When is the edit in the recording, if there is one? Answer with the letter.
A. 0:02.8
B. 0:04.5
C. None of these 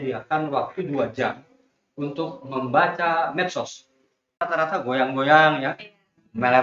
B